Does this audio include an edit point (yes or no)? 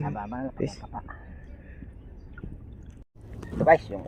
yes